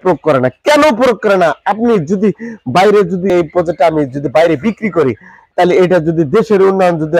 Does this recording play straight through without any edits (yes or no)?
yes